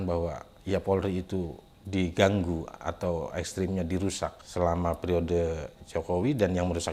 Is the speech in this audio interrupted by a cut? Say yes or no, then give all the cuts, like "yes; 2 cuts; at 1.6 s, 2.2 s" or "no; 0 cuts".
no; 0 cuts